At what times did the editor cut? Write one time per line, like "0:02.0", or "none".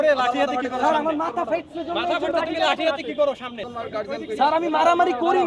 0:03.5